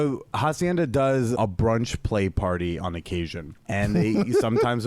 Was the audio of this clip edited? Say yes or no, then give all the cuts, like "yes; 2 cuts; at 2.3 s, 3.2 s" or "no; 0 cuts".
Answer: yes; 2 cuts; at 1.4 s, 3.6 s